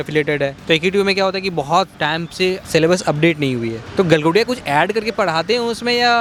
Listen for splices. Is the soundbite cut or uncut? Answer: uncut